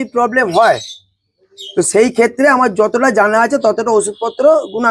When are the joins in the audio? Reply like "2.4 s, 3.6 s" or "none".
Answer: none